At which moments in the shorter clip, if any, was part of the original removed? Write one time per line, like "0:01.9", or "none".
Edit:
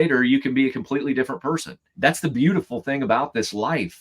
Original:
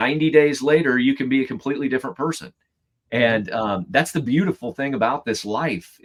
0:01.9